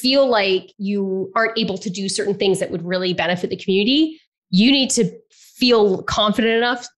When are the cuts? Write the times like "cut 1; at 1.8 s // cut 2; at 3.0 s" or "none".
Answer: none